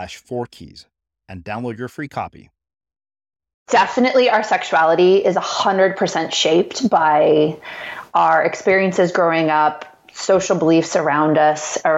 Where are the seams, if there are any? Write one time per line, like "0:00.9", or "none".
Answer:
0:03.7